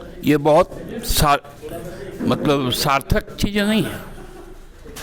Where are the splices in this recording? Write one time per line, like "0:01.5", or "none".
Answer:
none